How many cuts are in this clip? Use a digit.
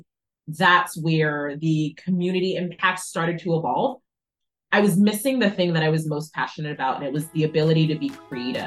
0